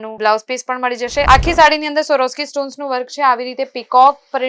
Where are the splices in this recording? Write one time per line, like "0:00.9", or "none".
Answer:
0:01.3